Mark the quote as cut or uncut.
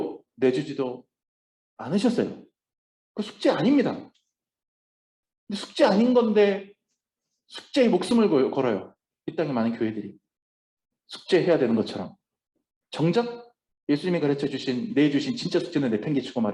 uncut